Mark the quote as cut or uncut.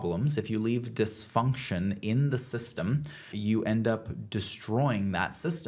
cut